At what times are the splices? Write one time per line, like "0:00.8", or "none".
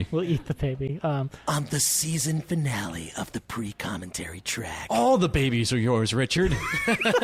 none